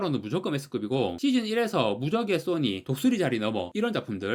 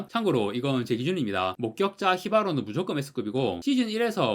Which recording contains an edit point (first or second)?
second